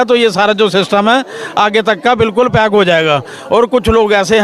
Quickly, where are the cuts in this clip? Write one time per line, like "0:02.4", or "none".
none